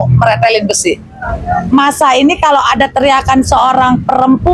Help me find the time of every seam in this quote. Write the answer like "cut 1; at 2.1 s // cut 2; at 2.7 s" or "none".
cut 1; at 1.6 s